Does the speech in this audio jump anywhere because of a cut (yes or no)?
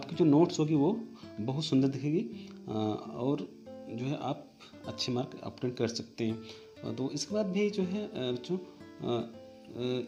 no